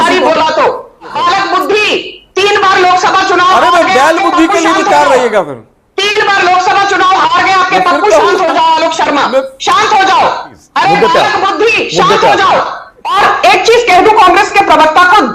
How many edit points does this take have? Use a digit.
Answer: 3